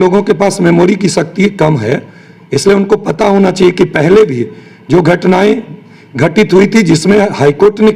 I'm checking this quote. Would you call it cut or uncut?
uncut